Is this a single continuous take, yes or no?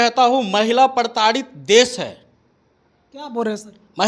yes